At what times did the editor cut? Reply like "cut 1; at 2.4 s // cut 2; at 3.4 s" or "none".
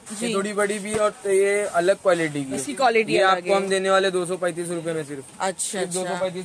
none